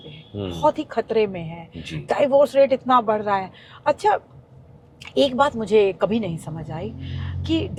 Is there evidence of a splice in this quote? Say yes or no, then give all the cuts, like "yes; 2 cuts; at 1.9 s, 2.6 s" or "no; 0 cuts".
no; 0 cuts